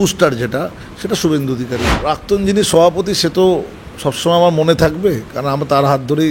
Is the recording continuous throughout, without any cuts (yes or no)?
no